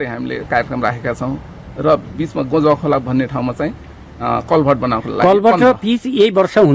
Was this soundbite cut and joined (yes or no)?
no